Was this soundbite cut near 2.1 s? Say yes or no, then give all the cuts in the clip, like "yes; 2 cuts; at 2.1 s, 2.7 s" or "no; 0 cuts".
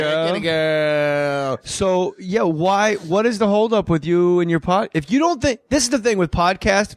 yes; 1 cut; at 2.1 s